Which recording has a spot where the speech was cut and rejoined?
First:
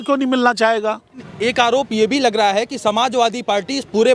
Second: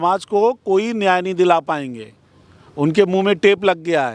first; 1 cut; at 1.3 s

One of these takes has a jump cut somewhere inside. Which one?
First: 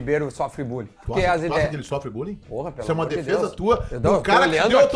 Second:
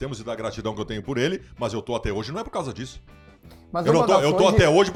first; 1 cut; at 1.0 s

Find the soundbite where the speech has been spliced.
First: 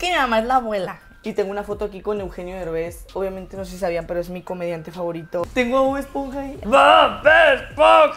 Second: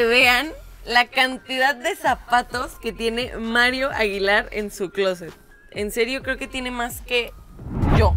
first; 3 cuts; at 1.1 s, 5.5 s, 6.6 s

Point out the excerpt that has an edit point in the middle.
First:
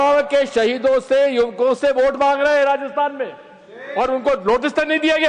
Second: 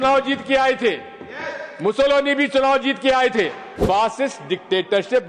second; 1 cut; at 3.7 s

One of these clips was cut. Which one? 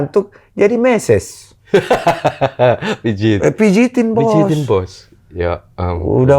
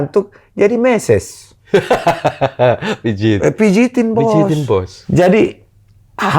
second; 1 cut; at 5.0 s

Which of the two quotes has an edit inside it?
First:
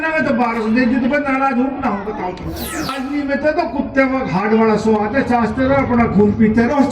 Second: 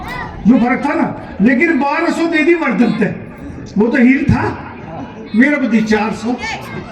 first; 1 cut; at 2.9 s

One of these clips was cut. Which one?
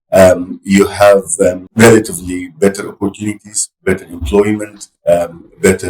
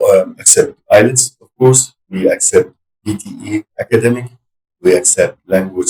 first; 1 cut; at 1.6 s

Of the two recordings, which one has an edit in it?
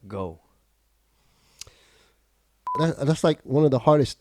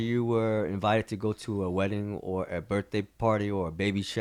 first; 1 cut; at 2.7 s

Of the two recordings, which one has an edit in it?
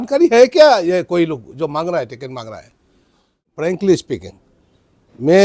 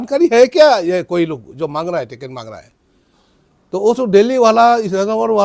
first; 1 cut; at 3.5 s

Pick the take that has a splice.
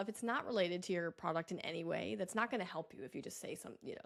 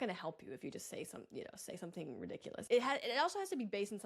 second; 1 cut; at 2.7 s

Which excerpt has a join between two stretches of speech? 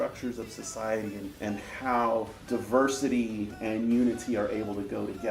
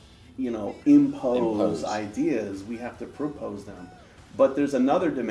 first; 2 cuts; at 1.3 s, 2.4 s

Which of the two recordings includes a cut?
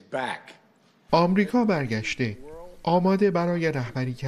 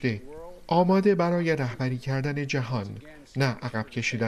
first; 1 cut; at 0.9 s

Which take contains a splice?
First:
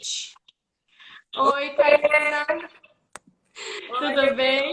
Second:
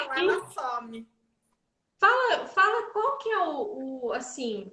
second; 1 cut; at 3.8 s

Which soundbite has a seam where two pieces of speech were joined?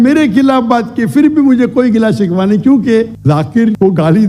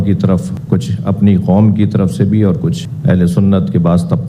first; 1 cut; at 3.1 s

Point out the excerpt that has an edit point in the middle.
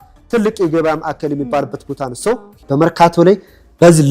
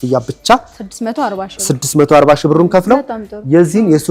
first; 1 cut; at 2.6 s

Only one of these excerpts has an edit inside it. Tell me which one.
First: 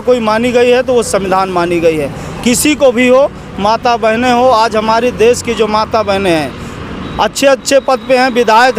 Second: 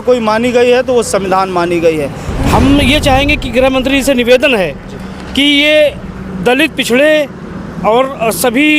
second; 1 cut; at 2.3 s

